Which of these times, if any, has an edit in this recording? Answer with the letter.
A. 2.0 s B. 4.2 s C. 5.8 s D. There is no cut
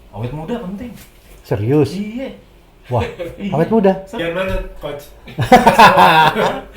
B